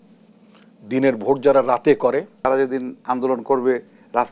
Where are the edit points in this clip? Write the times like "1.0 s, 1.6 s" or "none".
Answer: 2.4 s